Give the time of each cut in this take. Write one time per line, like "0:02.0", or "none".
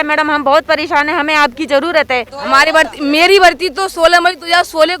0:02.3